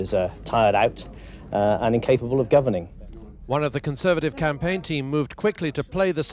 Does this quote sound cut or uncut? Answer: uncut